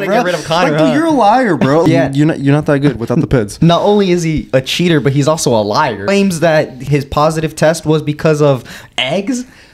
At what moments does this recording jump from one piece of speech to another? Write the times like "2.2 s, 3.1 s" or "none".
1.8 s, 6.1 s, 6.8 s

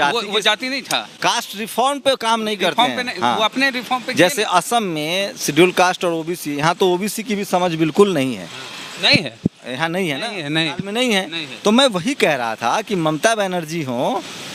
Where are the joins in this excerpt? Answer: none

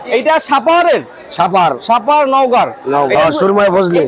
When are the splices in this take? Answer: 3.2 s

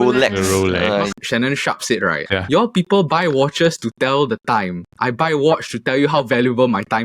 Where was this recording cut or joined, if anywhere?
1.1 s, 2.2 s

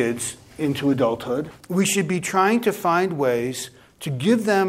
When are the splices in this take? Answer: 1.6 s

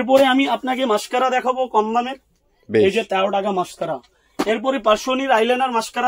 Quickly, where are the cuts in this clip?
none

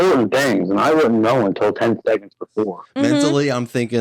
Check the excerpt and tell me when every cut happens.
2.8 s

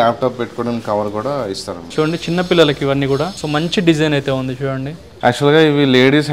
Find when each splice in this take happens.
1.8 s, 3.4 s, 5.1 s

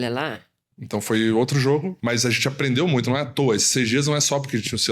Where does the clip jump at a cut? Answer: 1.9 s

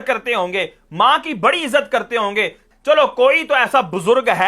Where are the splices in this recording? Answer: 2.7 s

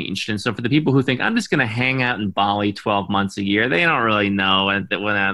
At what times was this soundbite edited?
none

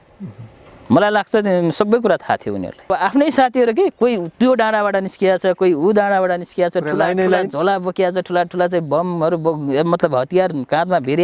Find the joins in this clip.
2.9 s

